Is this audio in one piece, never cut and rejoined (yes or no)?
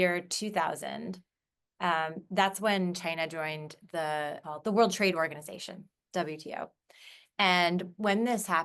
no